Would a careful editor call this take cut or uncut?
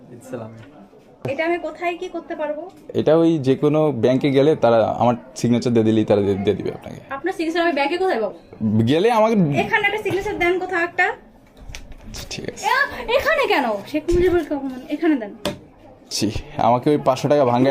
cut